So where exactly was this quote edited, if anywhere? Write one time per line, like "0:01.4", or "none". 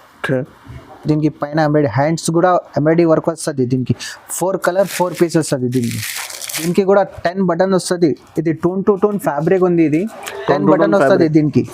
0:06.7